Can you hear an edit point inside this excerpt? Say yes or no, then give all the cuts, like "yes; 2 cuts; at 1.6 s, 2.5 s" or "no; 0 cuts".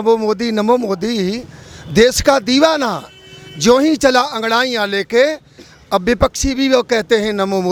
no; 0 cuts